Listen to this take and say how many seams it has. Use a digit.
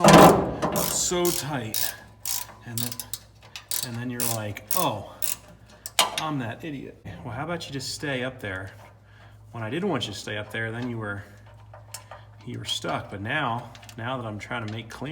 1